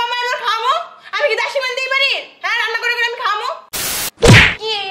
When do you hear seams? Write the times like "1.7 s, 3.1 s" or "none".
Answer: 3.6 s